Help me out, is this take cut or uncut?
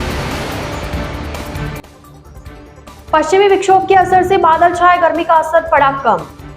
cut